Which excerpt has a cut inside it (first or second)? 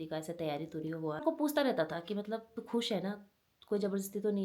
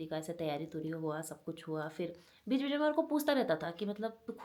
first